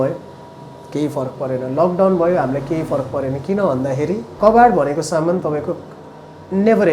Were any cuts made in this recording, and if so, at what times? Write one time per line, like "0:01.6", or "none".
0:04.2